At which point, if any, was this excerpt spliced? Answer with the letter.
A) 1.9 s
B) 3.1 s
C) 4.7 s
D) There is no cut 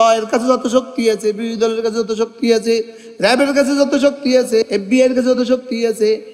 C